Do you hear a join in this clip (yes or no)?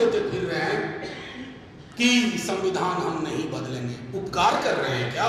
no